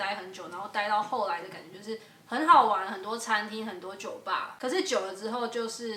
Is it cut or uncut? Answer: cut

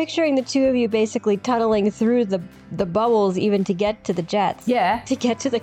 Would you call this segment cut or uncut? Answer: uncut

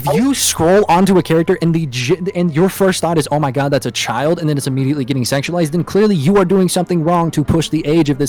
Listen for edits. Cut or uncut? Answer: uncut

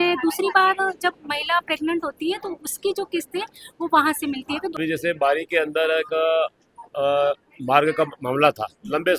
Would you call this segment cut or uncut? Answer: cut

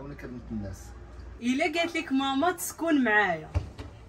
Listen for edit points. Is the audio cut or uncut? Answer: cut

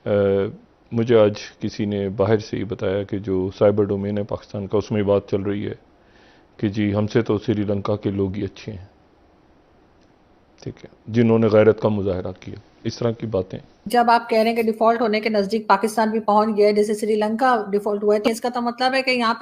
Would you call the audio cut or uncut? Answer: cut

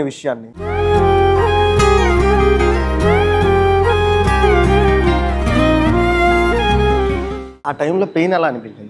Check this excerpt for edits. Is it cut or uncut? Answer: cut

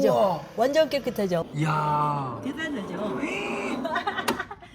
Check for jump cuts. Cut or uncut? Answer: cut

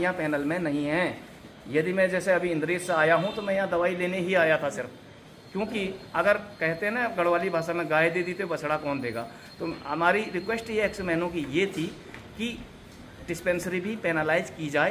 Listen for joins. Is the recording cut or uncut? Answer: uncut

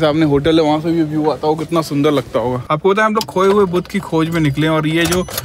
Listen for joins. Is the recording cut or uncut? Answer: cut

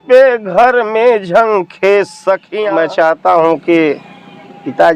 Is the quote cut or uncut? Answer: cut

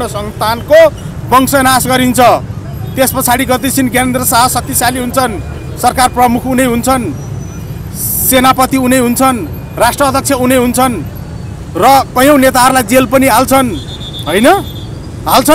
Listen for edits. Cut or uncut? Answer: uncut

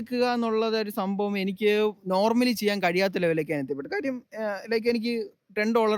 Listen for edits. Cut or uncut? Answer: uncut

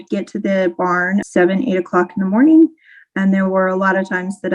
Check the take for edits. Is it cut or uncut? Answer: cut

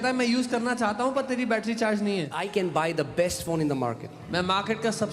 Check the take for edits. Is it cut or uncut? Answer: cut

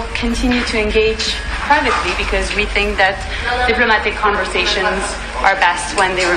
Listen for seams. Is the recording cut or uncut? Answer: uncut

